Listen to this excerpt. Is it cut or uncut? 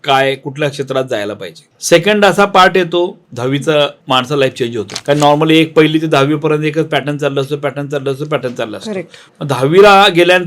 cut